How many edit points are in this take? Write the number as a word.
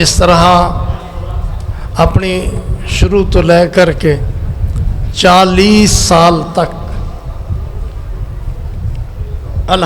zero